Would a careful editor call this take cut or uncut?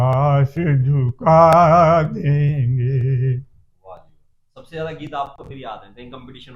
uncut